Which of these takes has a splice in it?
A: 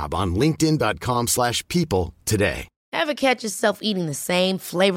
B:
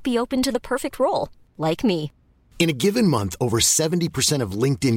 A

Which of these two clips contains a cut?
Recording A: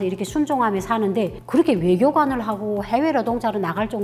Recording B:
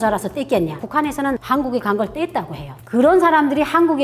B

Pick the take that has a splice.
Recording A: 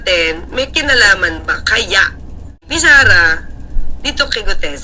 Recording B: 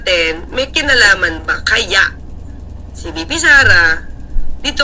A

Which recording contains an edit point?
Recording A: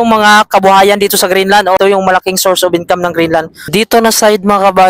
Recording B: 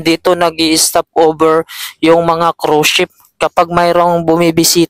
A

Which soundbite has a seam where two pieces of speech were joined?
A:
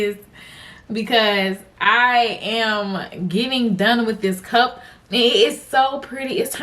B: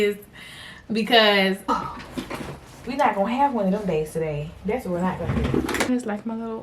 B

